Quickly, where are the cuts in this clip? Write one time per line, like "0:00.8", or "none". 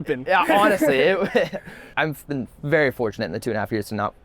0:01.9